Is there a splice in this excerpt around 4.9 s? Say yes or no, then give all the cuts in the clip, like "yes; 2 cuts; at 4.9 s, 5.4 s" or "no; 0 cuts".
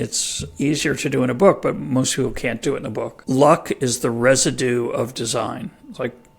no; 1 cut; at 3.2 s